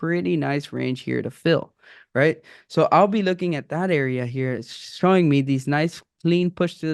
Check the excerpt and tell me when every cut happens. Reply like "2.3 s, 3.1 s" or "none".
none